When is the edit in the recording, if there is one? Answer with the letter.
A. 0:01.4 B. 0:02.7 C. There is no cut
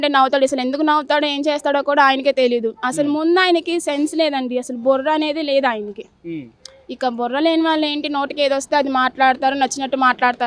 C